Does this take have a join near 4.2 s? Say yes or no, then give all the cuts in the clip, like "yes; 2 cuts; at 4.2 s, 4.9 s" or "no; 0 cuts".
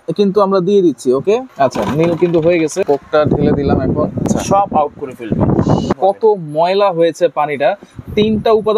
yes; 4 cuts; at 1.5 s, 2.8 s, 4.2 s, 5.9 s